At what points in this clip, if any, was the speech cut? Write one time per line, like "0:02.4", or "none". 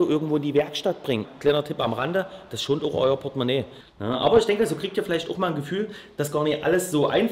0:01.3
0:03.8